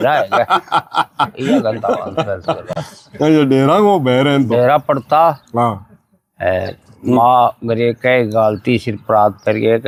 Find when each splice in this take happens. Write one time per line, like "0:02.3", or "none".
none